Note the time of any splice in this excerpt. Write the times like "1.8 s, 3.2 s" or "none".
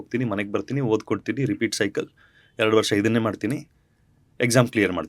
none